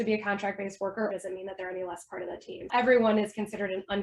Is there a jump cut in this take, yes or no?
yes